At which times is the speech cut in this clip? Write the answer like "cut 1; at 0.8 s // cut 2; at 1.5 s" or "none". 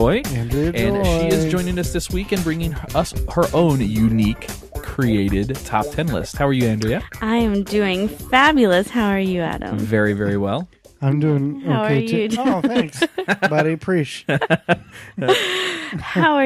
cut 1; at 15.6 s